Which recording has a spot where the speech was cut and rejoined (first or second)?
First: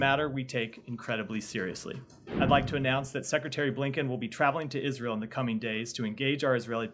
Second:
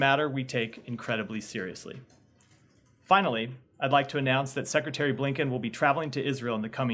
first